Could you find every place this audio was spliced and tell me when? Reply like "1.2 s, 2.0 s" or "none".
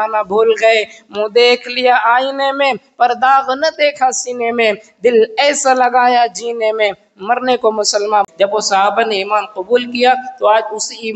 8.3 s